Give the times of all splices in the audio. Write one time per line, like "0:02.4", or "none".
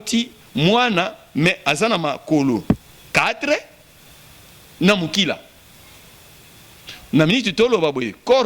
none

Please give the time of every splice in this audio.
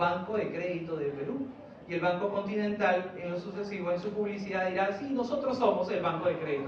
none

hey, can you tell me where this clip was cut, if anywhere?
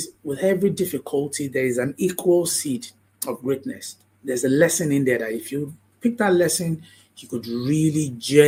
none

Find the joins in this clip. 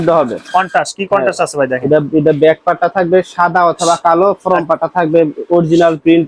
none

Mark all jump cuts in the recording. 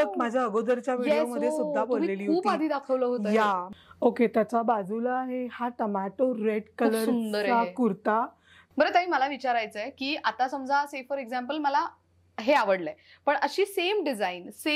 0:03.7
0:08.6

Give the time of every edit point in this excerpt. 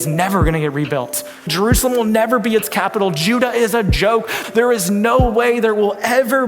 0:01.5
0:04.4

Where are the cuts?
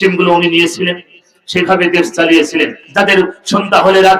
0:02.8

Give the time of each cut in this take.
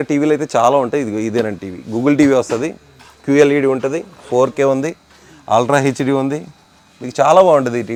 none

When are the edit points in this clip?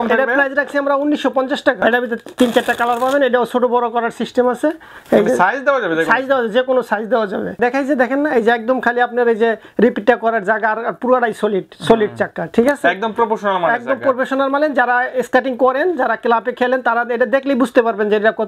0:01.8
0:07.5

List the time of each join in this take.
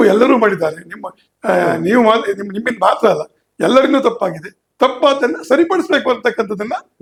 none

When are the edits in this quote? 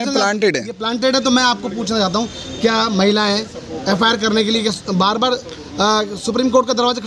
none

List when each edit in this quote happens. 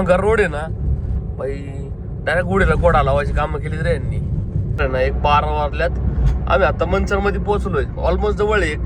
0:04.6

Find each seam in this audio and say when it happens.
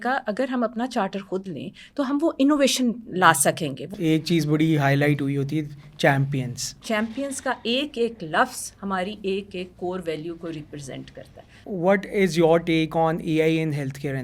0:03.8
0:06.8
0:11.6

